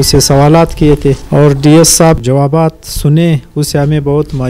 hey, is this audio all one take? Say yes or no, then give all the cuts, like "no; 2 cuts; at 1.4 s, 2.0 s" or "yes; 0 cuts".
no; 2 cuts; at 1.2 s, 2.2 s